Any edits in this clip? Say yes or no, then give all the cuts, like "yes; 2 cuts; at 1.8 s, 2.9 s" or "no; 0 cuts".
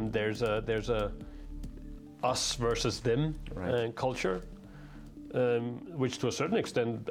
no; 0 cuts